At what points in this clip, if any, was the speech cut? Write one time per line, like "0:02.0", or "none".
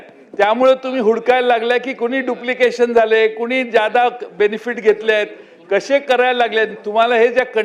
none